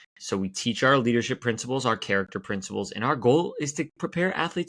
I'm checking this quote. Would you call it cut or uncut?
uncut